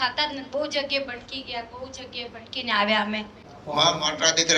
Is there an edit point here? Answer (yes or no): yes